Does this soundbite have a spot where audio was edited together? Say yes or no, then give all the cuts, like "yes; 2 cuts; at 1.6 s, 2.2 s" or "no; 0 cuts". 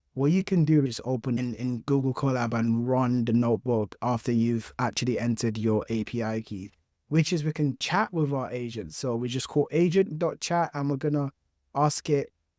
yes; 2 cuts; at 1.3 s, 7.0 s